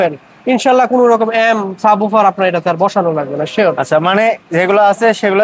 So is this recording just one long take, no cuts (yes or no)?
yes